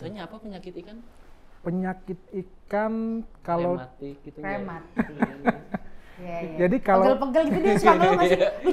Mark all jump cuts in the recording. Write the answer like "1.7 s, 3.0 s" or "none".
none